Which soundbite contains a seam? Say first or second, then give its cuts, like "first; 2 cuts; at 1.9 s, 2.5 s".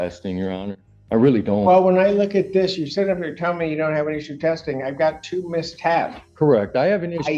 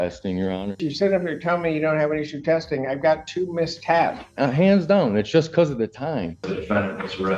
second; 3 cuts; at 0.9 s, 4.3 s, 6.5 s